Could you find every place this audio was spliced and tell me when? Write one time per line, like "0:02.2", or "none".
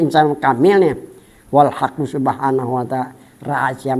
none